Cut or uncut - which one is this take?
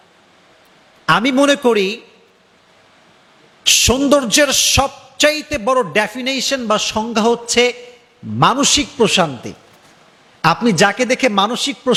uncut